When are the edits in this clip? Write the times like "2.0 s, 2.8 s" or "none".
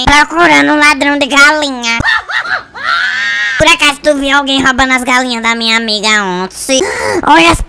3.4 s